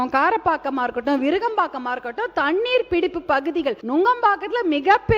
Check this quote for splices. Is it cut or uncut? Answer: cut